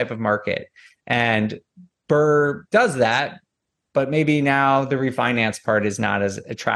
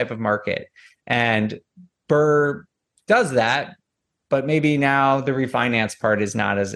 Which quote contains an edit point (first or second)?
first